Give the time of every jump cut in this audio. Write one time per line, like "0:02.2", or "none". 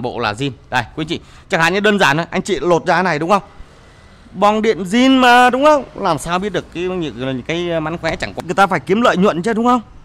0:08.3